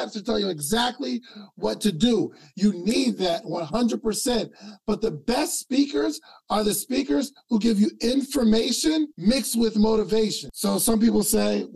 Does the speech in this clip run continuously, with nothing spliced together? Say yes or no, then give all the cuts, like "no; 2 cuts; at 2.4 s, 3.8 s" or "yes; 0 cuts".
no; 2 cuts; at 9.1 s, 10.5 s